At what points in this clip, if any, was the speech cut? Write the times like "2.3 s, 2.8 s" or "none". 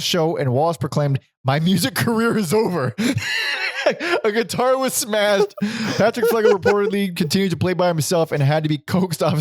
none